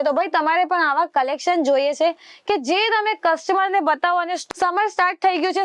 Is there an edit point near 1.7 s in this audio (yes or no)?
no